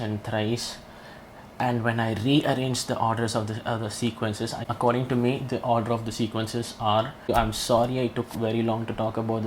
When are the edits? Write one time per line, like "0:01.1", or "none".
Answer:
0:04.6
0:07.3